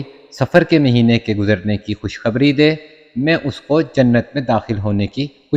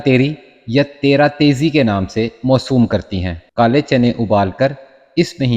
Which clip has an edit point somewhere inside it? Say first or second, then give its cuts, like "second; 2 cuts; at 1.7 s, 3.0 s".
second; 1 cut; at 3.4 s